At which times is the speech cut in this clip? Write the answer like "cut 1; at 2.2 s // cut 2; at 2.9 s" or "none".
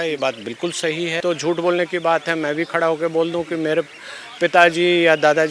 cut 1; at 1.2 s